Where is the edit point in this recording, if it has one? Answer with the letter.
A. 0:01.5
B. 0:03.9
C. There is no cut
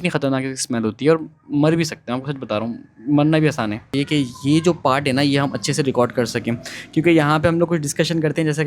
B